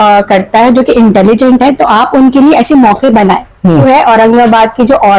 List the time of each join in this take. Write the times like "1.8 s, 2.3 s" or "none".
3.8 s